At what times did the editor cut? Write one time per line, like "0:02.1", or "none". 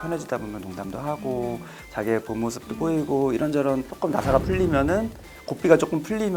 0:03.9